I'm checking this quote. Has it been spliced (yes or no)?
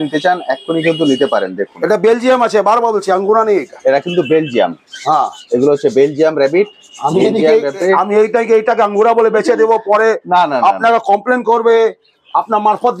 no